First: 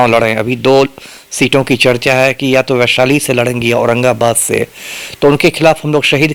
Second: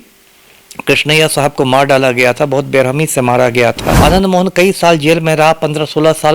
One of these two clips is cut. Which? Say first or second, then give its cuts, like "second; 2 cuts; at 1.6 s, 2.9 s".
second; 1 cut; at 3.9 s